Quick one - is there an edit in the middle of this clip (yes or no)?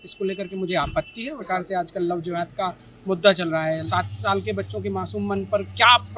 yes